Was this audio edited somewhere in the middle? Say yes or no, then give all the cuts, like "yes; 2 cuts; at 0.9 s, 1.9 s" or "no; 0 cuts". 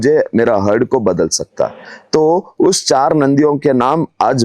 no; 0 cuts